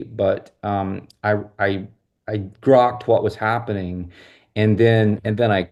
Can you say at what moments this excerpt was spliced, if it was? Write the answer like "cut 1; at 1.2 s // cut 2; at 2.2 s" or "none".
none